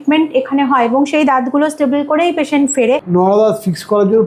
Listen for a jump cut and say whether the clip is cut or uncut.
cut